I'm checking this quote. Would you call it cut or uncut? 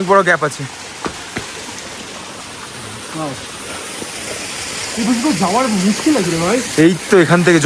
uncut